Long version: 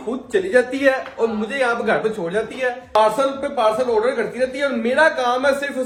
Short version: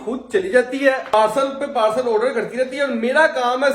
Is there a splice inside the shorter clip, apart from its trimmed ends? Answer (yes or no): yes